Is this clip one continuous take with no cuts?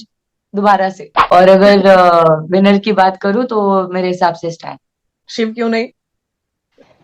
no; 2 cuts; at 1.1 s, 5.2 s

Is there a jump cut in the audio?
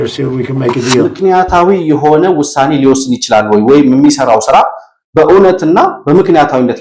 yes; 1 cut; at 1.1 s

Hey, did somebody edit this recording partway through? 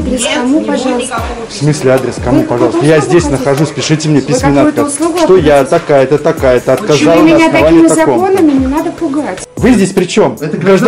yes; 1 cut; at 9.4 s

